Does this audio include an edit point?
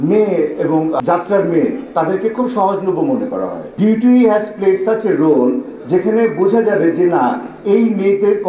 yes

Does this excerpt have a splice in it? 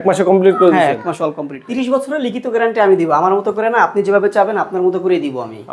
yes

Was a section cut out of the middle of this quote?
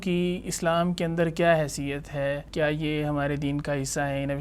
yes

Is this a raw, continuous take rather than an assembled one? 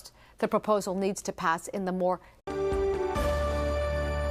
yes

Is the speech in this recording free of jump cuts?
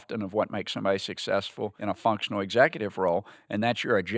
no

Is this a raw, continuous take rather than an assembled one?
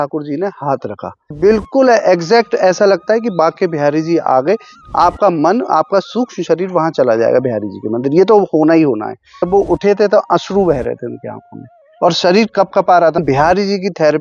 no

